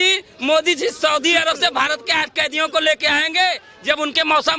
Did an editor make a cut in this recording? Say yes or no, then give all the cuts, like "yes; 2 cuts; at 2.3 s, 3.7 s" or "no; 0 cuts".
no; 0 cuts